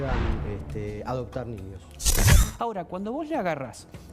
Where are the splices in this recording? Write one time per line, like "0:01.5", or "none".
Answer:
0:02.3